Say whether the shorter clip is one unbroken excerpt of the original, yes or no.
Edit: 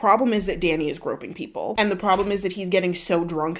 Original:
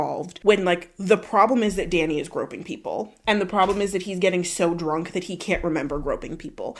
no